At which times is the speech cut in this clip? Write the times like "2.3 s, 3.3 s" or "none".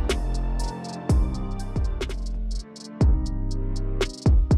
1.6 s